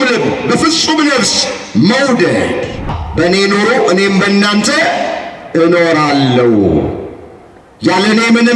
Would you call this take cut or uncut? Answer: cut